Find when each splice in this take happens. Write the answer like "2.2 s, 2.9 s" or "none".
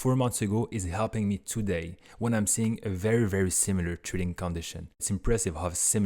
4.8 s

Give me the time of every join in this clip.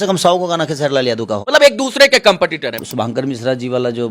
1.4 s, 2.8 s

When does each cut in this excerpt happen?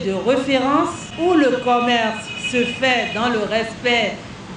1.0 s

